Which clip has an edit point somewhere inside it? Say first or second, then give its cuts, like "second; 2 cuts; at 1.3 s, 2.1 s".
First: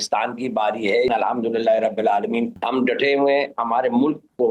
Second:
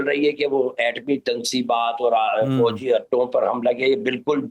first; 3 cuts; at 1.1 s, 2.6 s, 3.6 s